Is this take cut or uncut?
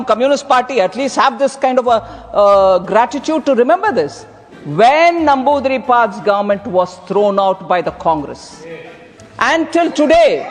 uncut